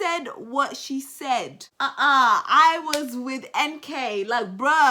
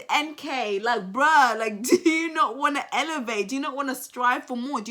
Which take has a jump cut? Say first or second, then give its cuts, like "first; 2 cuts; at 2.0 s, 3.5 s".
first; 1 cut; at 1.6 s